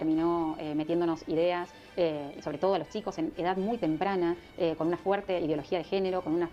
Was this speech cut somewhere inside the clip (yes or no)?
no